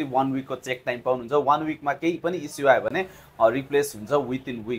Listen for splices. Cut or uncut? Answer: uncut